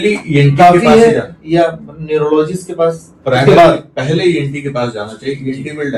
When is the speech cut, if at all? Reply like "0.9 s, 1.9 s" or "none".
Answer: none